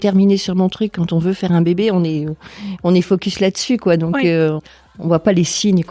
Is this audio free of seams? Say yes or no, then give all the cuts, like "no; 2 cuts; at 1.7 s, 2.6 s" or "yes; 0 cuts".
no; 1 cut; at 4.6 s